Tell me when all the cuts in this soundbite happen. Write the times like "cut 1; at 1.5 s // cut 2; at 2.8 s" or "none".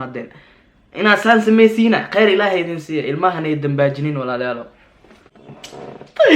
cut 1; at 5.2 s

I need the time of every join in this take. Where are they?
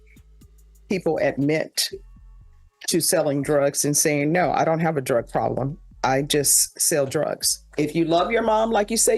cut 1; at 7.7 s

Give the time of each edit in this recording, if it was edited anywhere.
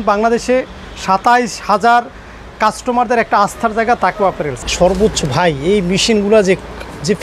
cut 1; at 4.6 s

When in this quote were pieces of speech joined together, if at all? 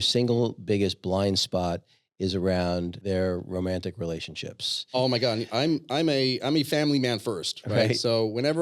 cut 1; at 3.0 s // cut 2; at 5.0 s

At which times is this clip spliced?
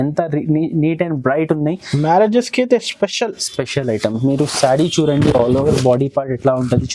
none

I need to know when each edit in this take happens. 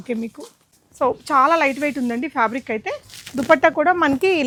none

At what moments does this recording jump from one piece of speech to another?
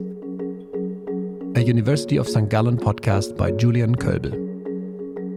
none

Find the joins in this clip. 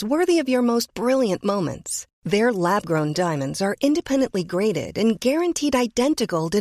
none

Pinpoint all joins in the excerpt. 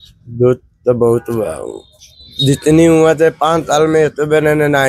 none

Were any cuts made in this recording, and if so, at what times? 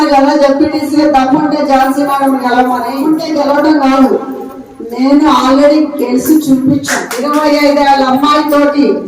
cut 1; at 3.0 s // cut 2; at 7.2 s

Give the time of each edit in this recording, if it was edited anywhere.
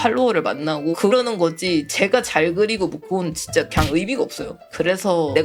none

